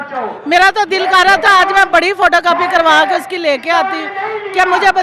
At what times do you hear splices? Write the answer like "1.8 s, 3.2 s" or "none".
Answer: none